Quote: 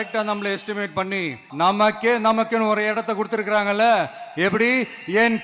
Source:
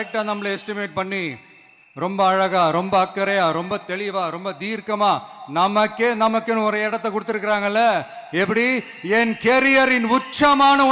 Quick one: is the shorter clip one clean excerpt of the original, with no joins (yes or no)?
no